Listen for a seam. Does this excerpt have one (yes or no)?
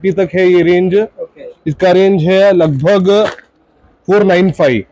no